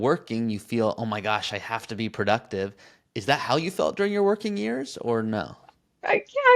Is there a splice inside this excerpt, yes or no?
no